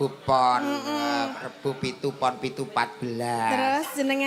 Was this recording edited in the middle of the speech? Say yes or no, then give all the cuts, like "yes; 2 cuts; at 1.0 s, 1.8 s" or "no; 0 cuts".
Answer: no; 0 cuts